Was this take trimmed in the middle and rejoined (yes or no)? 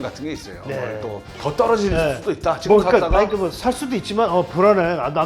yes